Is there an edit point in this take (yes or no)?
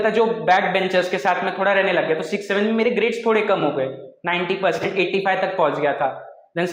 no